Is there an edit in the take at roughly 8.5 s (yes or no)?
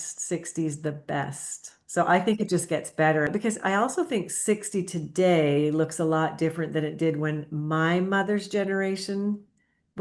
no